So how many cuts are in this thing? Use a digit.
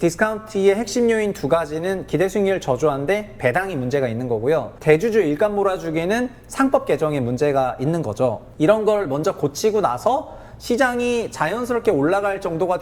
2